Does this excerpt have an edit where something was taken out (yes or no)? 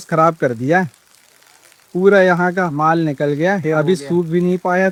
no